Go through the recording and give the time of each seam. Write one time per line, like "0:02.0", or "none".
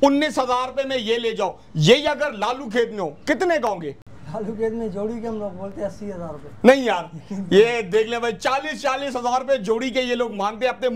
none

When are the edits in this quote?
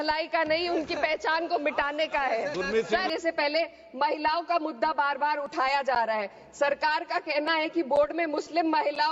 0:03.1

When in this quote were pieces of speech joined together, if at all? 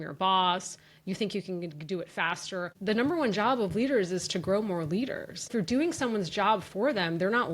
0:02.7
0:05.5

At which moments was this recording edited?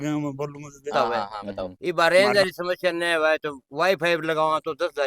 0:01.7

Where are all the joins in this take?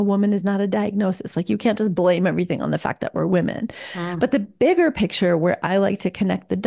none

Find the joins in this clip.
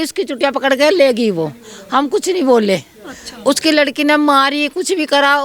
none

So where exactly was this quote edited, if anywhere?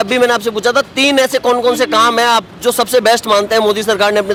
none

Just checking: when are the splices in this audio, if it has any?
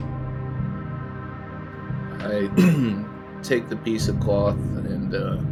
none

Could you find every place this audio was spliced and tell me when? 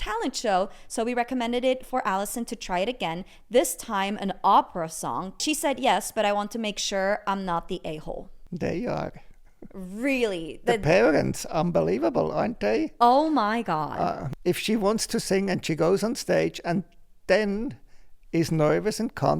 0:05.4
0:08.3
0:14.3

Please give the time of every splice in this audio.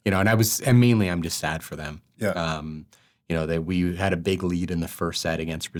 none

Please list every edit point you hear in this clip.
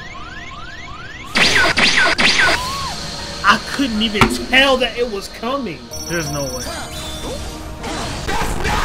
0:06.0

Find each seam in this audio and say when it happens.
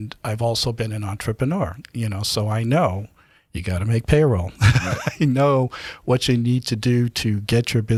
none

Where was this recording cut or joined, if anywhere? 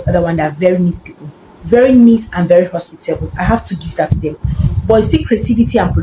none

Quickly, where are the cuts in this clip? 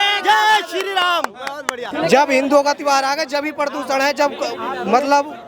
0:01.9

